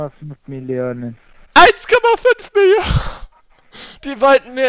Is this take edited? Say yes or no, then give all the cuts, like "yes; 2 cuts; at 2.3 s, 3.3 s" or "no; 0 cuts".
no; 0 cuts